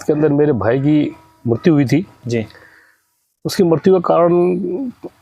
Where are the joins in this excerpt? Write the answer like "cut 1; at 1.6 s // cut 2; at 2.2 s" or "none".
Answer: none

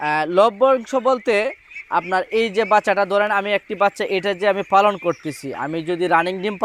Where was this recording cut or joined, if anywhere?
none

